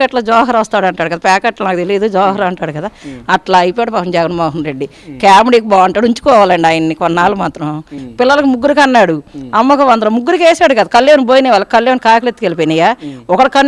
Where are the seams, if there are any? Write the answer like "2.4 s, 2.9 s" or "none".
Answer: 7.9 s